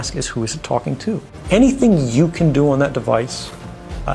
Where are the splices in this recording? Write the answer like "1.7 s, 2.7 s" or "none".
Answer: 1.3 s